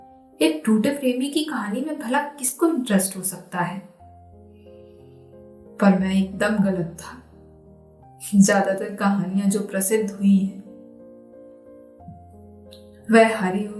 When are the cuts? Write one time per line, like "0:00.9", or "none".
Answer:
0:11.1
0:12.7